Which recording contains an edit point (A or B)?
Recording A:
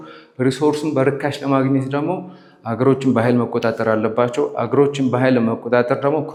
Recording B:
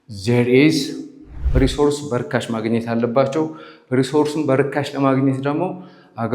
B